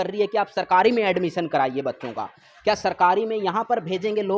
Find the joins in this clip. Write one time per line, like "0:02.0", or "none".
none